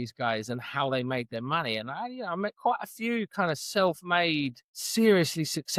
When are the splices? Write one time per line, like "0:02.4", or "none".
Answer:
none